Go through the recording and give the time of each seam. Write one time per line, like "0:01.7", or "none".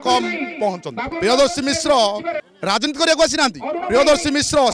0:01.1
0:02.4